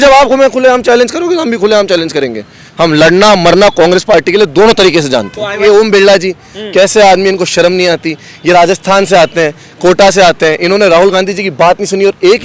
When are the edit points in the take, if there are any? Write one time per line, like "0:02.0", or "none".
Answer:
0:02.7
0:05.6